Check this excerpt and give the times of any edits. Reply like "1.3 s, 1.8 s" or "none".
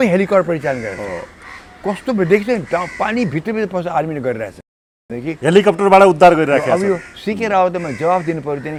none